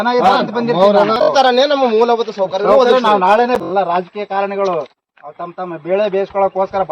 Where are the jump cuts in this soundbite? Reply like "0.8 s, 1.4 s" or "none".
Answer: 1.3 s, 3.6 s